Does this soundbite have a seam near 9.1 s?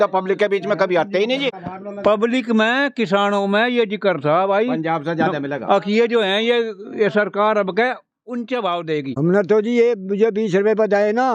yes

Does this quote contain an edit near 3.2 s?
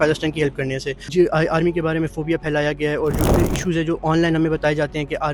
yes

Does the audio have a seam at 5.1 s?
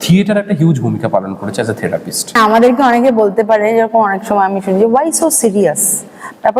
no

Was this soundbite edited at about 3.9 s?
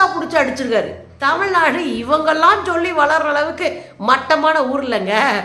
no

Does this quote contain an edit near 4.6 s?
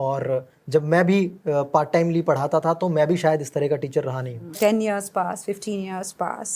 yes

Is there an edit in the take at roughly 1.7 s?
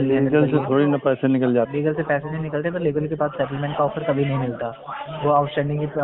yes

